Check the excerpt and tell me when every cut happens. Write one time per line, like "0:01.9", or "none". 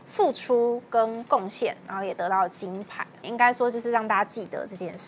0:03.1